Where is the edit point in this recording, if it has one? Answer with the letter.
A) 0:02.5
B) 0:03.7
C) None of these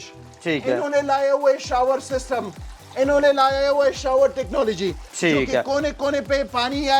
C